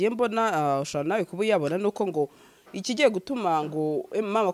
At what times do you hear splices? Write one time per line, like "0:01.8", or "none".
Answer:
none